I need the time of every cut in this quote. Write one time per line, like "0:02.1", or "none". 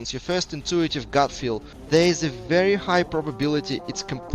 0:01.7